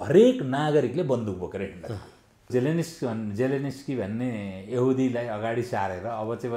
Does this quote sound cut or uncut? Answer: cut